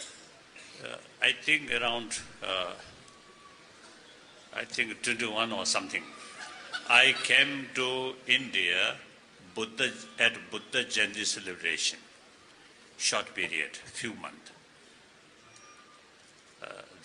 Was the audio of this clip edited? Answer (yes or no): yes